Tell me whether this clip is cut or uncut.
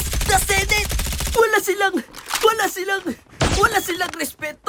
uncut